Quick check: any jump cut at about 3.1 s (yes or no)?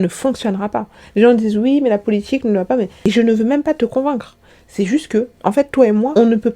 yes